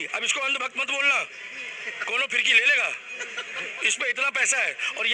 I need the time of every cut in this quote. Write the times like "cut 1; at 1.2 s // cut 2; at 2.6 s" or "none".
none